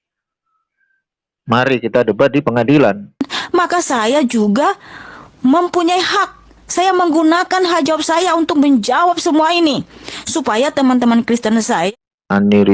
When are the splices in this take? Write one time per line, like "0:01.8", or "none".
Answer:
0:03.3
0:11.9